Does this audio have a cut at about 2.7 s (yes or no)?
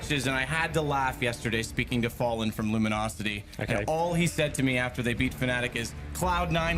no